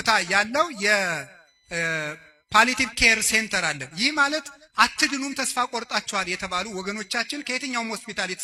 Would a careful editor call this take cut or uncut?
uncut